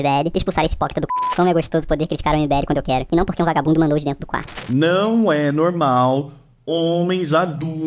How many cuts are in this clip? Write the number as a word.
two